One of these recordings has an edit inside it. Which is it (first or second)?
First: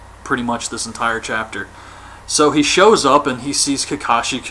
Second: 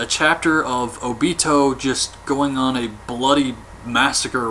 first